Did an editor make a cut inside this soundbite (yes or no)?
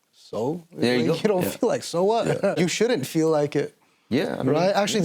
yes